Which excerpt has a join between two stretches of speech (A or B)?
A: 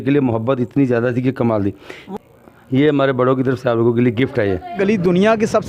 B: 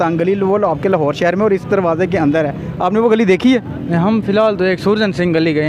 A